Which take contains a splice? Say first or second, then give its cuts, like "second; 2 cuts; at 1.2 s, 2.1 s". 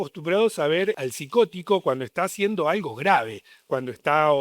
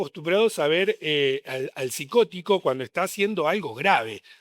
first; 1 cut; at 1.0 s